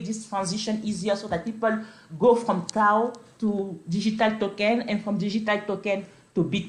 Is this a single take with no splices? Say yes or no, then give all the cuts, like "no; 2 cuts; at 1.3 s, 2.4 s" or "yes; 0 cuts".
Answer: yes; 0 cuts